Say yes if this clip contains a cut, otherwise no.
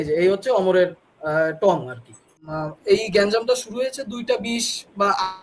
yes